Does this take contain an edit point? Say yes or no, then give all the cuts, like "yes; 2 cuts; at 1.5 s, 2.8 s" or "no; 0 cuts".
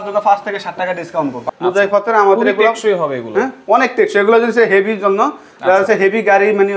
yes; 1 cut; at 1.4 s